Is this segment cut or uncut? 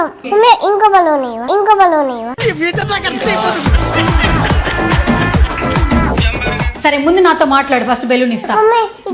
cut